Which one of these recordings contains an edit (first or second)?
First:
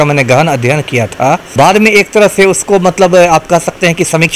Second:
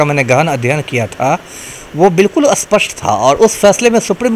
first